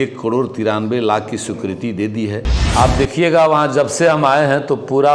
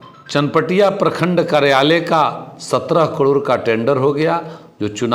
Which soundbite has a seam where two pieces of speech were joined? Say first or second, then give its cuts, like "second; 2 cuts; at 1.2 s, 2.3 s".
first; 1 cut; at 2.6 s